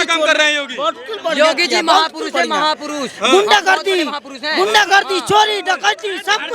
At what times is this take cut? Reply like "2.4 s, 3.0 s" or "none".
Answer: none